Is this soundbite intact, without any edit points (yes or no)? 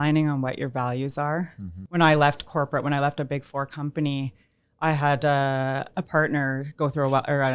no